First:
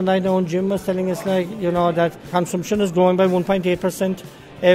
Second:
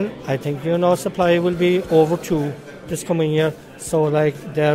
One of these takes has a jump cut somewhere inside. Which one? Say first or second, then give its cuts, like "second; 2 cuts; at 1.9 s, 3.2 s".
first; 1 cut; at 2.3 s